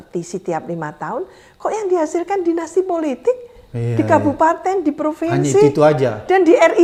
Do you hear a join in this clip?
no; 0 cuts

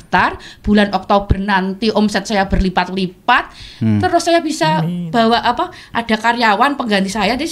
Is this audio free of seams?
yes; 0 cuts

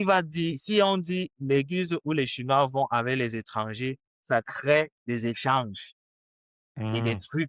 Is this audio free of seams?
yes; 0 cuts

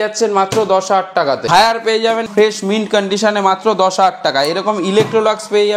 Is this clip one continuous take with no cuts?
no; 2 cuts; at 1.5 s, 2.3 s

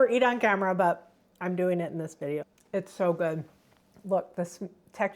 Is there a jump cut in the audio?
yes; 1 cut; at 2.5 s

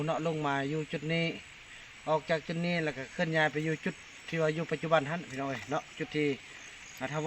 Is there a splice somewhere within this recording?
no; 0 cuts

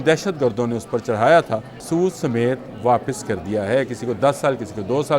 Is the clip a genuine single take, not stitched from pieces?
no; 1 cut; at 1.7 s

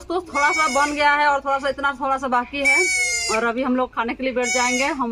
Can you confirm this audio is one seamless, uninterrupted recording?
yes; 0 cuts

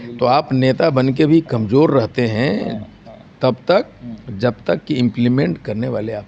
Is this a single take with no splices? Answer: yes; 0 cuts

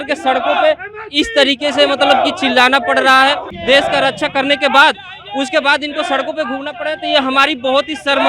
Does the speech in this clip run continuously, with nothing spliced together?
no; 1 cut; at 3.5 s

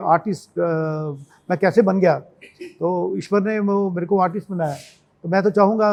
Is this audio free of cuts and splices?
yes; 0 cuts

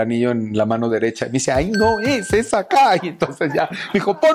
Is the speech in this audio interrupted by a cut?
no; 0 cuts

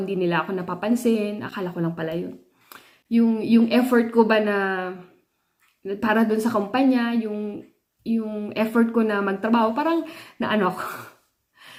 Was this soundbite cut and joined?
no; 0 cuts

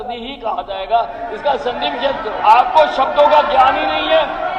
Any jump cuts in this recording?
yes; 1 cut; at 2.3 s

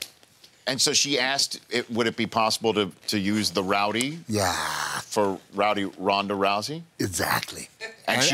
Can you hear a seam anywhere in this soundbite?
no; 0 cuts

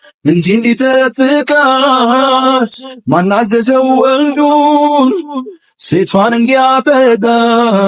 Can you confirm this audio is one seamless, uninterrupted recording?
yes; 0 cuts

